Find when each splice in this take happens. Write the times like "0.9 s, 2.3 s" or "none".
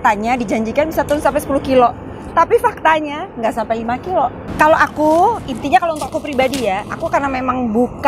4.4 s